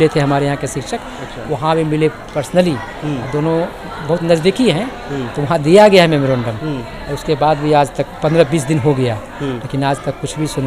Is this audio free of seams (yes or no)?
yes